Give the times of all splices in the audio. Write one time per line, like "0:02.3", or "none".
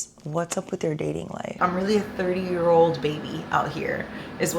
0:01.5

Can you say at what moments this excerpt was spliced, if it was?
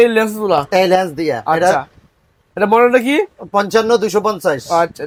none

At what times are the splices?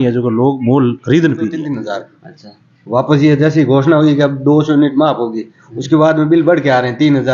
0:01.7

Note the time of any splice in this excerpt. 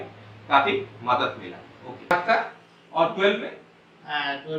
0:01.9

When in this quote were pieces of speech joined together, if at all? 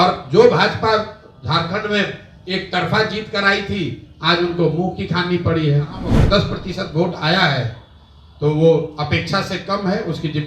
0:06.1

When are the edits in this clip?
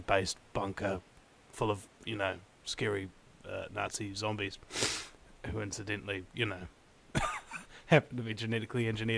none

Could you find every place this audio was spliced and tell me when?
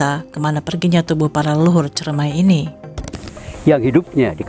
0:03.2

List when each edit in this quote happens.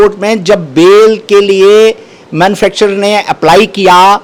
none

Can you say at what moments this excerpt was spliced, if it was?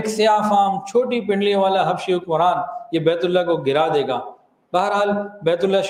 none

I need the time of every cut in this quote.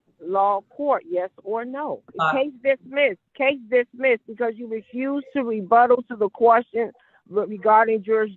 0:02.1
0:03.2

